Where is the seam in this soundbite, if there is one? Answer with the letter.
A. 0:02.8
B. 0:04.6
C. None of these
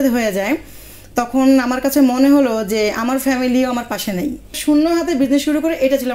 B